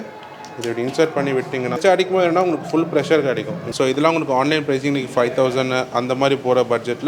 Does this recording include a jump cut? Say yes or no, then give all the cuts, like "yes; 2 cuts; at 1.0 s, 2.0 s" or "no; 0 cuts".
yes; 2 cuts; at 1.8 s, 3.6 s